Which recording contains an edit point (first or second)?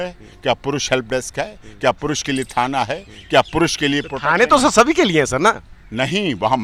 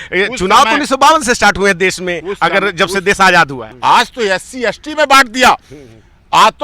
second